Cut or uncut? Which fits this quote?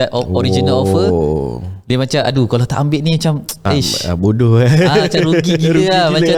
uncut